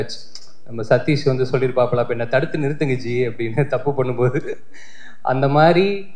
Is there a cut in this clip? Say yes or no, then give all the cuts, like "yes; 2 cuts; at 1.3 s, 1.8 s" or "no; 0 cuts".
no; 0 cuts